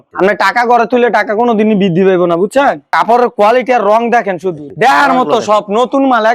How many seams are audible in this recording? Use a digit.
2